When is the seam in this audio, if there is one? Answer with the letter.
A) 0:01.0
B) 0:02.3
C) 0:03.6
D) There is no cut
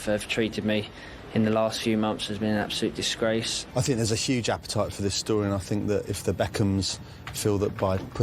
C